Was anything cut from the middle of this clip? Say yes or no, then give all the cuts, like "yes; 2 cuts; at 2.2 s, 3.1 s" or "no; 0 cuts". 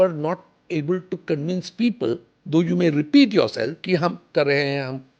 yes; 1 cut; at 4.2 s